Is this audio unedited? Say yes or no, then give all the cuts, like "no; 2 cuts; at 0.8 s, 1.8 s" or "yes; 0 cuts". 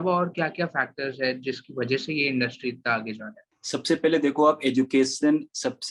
yes; 0 cuts